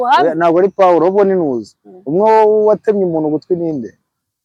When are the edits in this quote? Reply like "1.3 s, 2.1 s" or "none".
none